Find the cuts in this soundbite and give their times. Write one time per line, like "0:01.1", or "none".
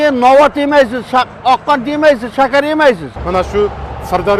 0:03.1